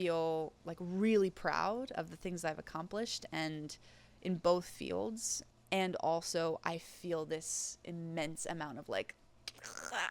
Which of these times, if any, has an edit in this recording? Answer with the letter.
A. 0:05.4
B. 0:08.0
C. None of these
A